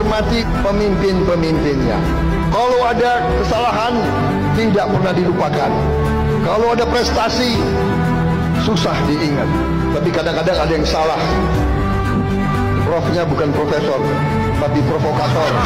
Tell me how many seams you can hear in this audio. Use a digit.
0